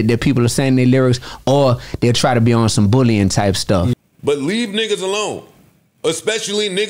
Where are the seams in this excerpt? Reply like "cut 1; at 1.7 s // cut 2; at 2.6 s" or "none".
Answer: cut 1; at 3.9 s

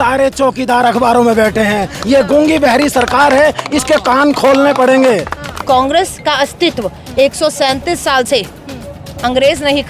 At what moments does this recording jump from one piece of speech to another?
cut 1; at 1.9 s // cut 2; at 5.5 s

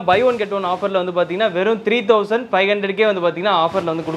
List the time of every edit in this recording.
none

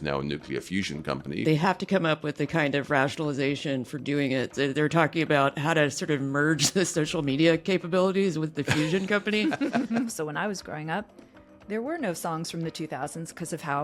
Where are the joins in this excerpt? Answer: cut 1; at 1.4 s // cut 2; at 4.5 s // cut 3; at 10.1 s

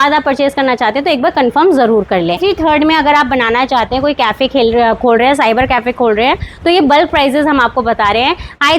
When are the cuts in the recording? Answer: cut 1; at 2.4 s

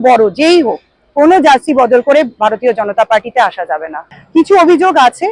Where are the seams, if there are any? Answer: none

